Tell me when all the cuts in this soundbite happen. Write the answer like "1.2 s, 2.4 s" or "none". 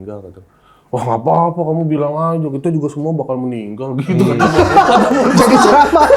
none